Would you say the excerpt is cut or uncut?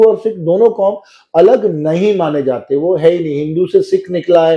uncut